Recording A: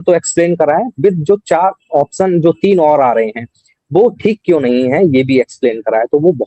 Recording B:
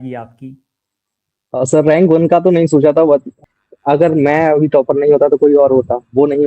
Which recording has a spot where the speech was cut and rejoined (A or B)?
B